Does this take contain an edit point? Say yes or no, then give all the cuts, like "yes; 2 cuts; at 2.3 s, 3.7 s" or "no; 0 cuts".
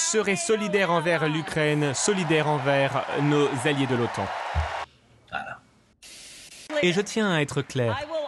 yes; 1 cut; at 6.3 s